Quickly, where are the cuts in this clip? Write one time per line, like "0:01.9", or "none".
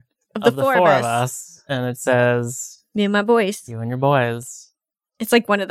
none